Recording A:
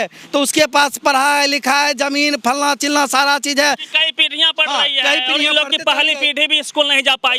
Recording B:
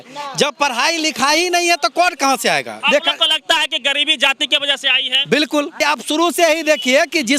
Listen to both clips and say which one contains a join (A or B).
B